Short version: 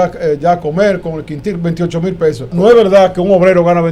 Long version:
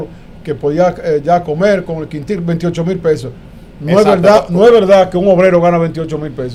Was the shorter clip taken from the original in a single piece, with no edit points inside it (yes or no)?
no